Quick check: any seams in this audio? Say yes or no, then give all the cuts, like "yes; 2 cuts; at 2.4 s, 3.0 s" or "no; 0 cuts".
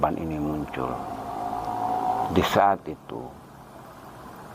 yes; 1 cut; at 2.3 s